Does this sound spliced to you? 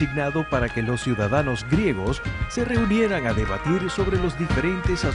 no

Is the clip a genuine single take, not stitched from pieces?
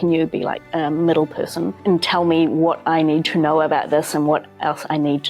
yes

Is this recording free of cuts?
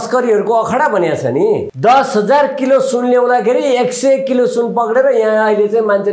no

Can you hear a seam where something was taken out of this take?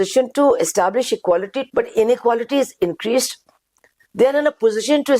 yes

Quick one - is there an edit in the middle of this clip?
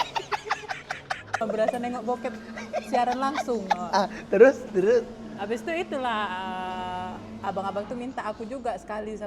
yes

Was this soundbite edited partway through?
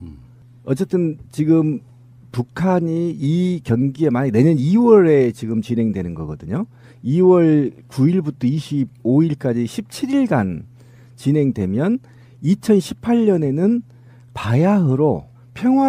yes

